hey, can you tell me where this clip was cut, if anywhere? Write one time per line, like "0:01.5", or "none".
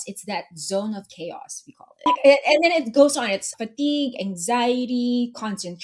0:02.1
0:03.5